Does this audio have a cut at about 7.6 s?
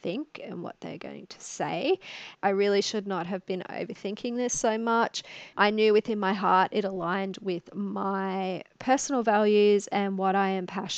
no; 1 cut; at 2.3 s

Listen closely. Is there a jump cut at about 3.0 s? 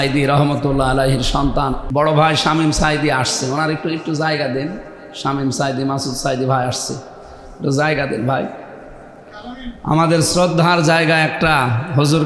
no; 1 cut; at 1.8 s

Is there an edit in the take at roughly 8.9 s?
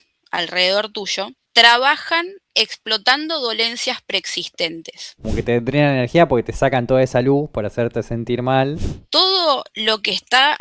yes; 3 cuts; at 1.4 s, 5.3 s, 8.9 s

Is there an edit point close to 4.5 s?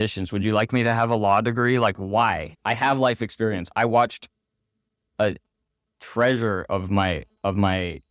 no; 1 cut; at 2.5 s

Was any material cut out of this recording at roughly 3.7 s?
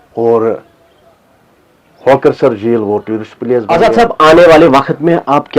yes; 1 cut; at 3.7 s

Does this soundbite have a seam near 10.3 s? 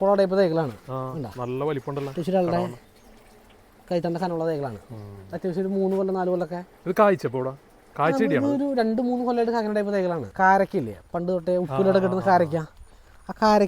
yes; 1 cut; at 10.3 s

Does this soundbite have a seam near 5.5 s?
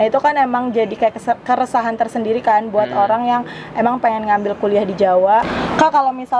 yes; 1 cut; at 5.5 s

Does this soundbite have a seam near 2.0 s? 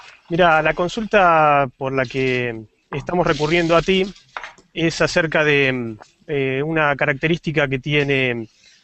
yes; 1 cut; at 2.0 s

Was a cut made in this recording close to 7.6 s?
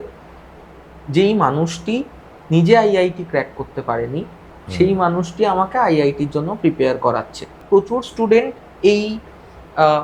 yes; 1 cut; at 7.6 s

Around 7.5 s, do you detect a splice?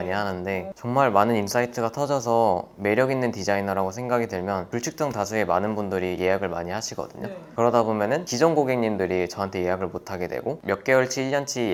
no; 0 cuts

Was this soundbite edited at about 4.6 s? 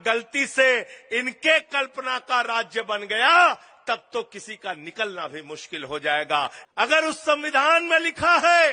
no; 1 cut; at 6.6 s

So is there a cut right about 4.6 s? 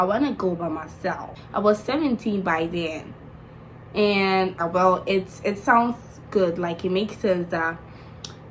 yes; 2 cuts; at 1.3 s, 4.6 s

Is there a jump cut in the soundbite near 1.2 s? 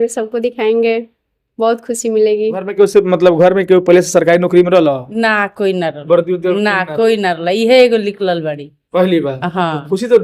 no; 1 cut; at 2.7 s

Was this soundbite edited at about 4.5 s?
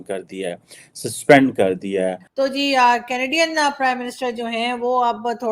no; 1 cut; at 2.2 s

